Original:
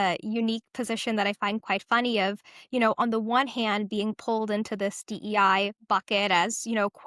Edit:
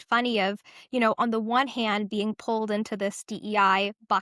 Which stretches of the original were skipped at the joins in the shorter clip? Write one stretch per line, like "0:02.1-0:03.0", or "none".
none